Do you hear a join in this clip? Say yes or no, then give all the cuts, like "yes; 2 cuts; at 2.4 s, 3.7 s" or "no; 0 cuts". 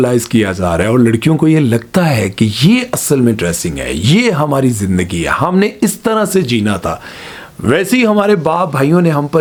no; 0 cuts